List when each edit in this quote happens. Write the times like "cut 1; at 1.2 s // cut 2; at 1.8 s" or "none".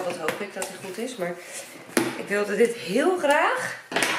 none